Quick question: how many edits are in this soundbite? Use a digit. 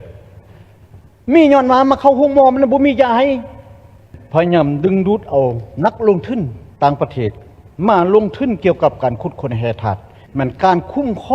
2